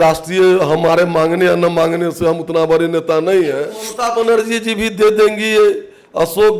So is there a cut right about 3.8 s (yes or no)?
yes